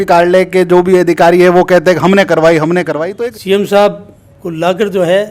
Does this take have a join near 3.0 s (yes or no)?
yes